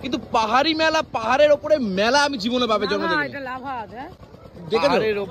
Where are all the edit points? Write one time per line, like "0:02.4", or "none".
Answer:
none